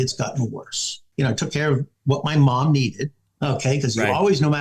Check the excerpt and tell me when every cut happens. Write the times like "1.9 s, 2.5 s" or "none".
1.0 s

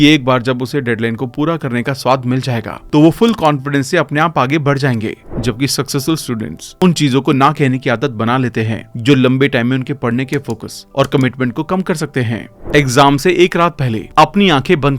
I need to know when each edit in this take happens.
5.3 s, 12.5 s

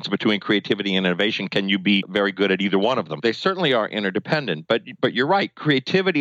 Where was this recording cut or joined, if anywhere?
3.1 s

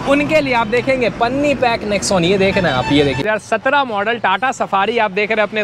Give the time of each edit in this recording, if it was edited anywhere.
3.2 s

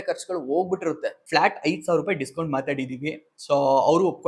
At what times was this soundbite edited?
1.2 s

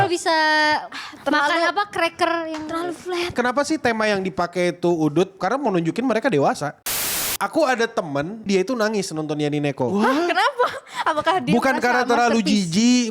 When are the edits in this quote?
3.3 s, 5.4 s, 6.9 s, 8.5 s

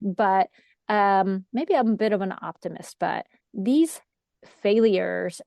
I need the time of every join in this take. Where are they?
3.4 s

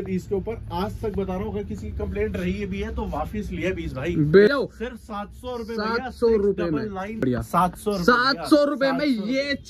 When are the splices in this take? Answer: 4.5 s, 7.2 s

